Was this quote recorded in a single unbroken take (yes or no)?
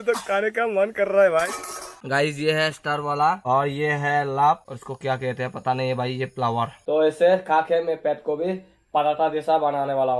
no